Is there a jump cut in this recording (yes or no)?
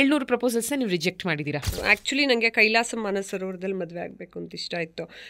yes